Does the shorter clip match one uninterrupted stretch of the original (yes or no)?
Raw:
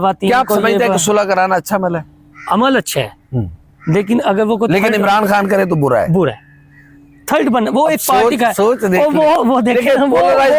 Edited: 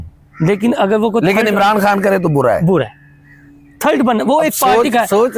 yes